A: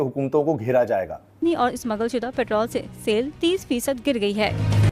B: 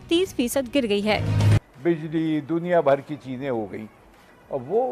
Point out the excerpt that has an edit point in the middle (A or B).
A